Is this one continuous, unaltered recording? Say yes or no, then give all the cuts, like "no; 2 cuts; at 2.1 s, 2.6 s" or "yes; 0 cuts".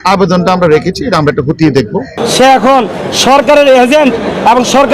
no; 1 cut; at 2.1 s